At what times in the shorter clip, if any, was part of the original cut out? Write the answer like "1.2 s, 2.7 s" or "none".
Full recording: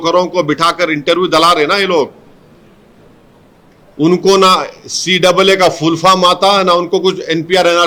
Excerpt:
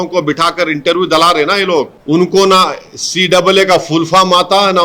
2.0 s